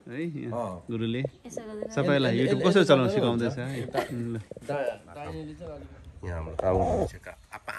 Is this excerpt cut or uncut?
cut